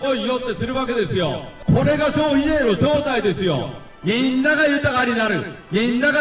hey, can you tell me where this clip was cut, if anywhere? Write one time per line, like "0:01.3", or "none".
0:01.5
0:03.9